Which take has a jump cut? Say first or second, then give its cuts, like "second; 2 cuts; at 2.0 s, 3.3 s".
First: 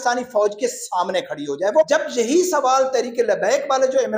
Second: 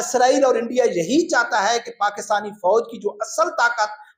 first; 1 cut; at 1.9 s